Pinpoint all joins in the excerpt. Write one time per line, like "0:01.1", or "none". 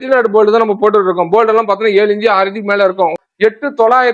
0:03.2